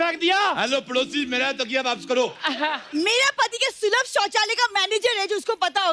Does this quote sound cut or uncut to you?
cut